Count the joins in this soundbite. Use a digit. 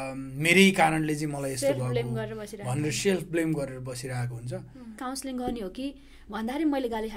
1